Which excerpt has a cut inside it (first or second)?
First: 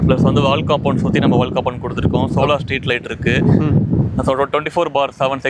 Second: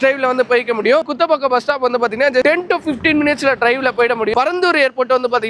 second